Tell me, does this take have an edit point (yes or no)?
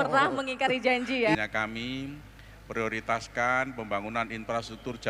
yes